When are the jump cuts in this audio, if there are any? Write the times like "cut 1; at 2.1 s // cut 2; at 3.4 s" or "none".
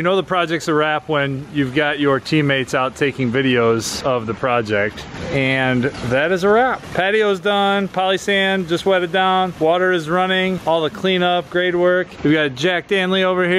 none